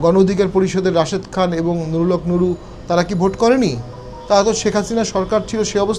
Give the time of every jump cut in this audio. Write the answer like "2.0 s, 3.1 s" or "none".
none